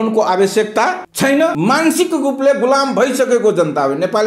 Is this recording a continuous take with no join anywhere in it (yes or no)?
no